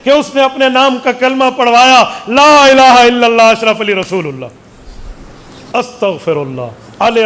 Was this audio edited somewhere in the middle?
no; 0 cuts

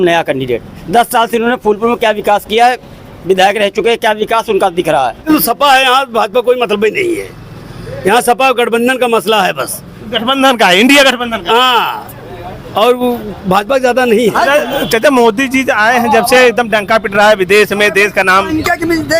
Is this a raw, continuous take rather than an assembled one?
no; 2 cuts; at 5.2 s, 14.3 s

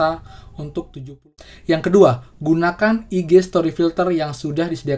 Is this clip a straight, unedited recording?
no; 1 cut; at 1.2 s

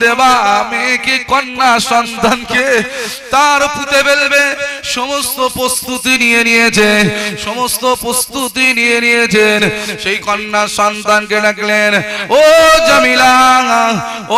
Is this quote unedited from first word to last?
yes; 0 cuts

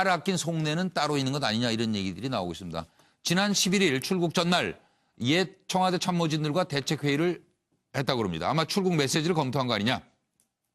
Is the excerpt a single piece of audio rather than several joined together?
yes; 0 cuts

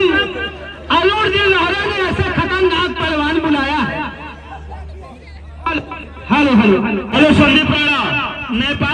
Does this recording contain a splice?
yes; 1 cut; at 7.1 s

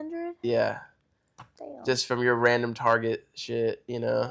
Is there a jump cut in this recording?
no; 0 cuts

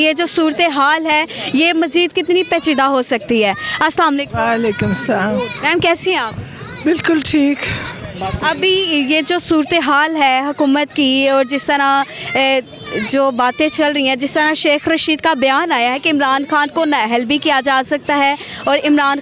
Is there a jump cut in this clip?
no; 0 cuts

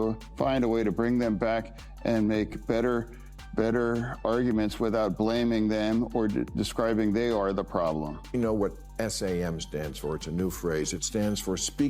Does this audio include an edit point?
yes; 1 cut; at 8.2 s

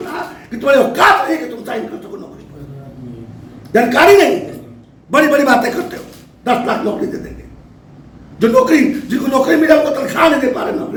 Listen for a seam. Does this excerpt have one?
no; 0 cuts

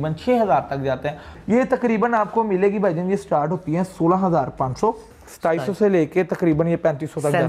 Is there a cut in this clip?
yes; 2 cuts; at 1.3 s, 5.1 s

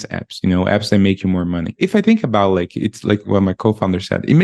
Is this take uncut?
no; 2 cuts; at 1.7 s, 3.2 s

